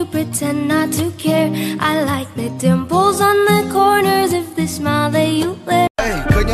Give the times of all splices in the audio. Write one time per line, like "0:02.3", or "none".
0:05.6